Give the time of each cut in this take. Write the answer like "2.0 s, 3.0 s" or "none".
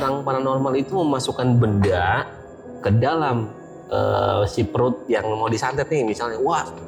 none